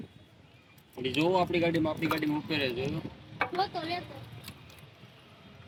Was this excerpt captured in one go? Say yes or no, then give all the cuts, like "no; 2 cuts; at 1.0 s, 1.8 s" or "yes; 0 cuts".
yes; 0 cuts